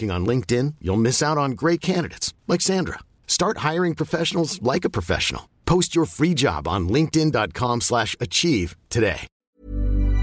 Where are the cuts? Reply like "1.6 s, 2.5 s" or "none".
9.3 s